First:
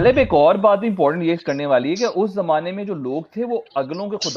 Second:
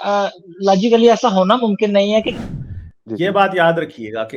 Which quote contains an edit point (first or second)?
second